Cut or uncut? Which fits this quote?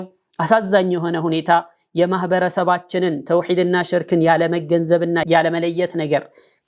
uncut